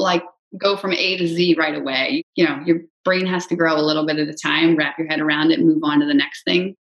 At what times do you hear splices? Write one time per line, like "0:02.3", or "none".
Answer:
0:02.2